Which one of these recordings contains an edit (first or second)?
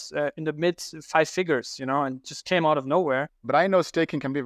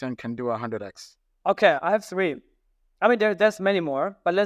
first